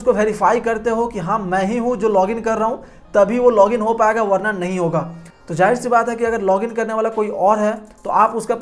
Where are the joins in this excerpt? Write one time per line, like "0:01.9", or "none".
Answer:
none

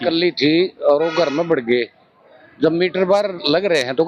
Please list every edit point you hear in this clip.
none

